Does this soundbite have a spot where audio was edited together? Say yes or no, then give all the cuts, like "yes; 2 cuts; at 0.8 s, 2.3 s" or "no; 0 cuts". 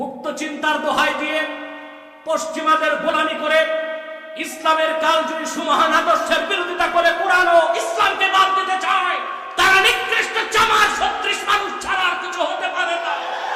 no; 0 cuts